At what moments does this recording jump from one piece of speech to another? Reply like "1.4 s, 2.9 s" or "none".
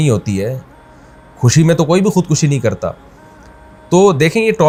none